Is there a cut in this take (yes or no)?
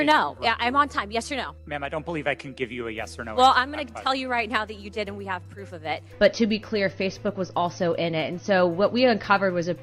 yes